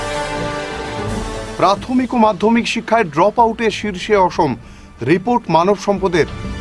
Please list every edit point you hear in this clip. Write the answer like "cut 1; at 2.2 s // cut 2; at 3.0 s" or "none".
none